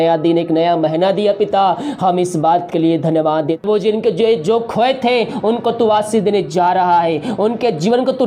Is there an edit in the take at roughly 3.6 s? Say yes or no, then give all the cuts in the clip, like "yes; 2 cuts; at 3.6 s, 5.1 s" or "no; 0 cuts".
yes; 1 cut; at 3.6 s